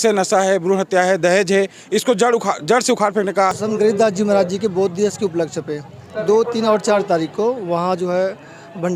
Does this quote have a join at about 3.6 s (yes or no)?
yes